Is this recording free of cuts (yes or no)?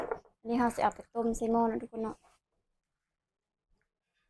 yes